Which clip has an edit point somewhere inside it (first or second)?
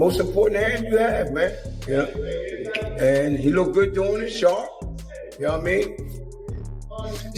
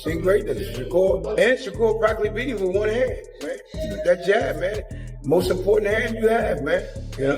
second